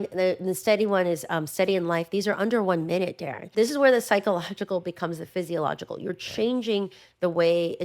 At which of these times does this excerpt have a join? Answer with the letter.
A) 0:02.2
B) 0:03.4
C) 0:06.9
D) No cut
B